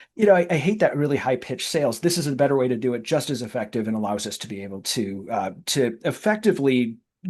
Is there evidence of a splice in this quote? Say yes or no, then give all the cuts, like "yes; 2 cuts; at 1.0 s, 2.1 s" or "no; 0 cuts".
no; 0 cuts